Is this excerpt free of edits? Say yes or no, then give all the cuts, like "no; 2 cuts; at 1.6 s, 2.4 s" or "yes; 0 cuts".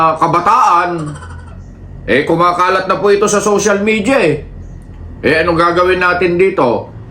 no; 1 cut; at 1.5 s